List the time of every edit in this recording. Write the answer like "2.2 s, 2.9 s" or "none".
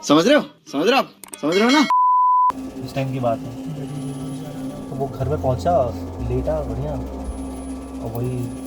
2.7 s